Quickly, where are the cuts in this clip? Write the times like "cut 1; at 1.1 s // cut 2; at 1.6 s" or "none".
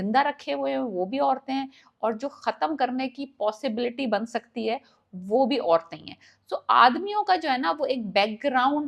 none